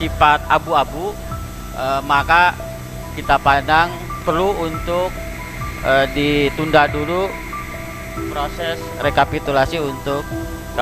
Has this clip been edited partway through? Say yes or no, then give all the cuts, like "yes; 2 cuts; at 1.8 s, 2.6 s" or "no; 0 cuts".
no; 0 cuts